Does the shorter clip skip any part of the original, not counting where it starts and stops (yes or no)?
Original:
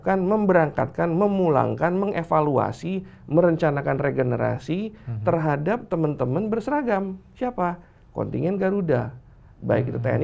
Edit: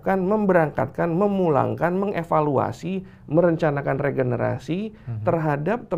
no